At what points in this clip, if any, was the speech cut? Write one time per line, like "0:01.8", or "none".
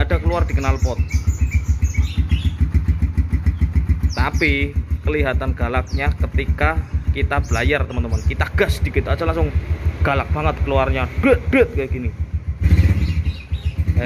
0:02.1